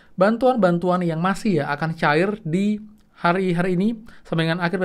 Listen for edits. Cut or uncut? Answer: uncut